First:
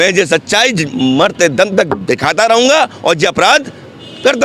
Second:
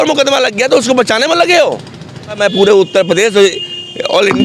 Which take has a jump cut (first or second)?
second